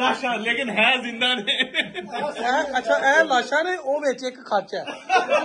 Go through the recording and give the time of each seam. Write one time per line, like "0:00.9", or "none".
none